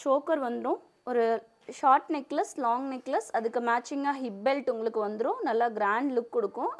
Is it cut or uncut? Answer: uncut